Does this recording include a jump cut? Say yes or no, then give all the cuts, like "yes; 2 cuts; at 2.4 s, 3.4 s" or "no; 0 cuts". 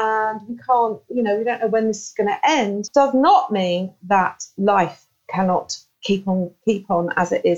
yes; 1 cut; at 4.5 s